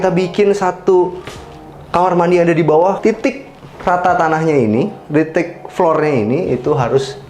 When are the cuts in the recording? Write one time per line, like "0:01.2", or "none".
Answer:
0:03.0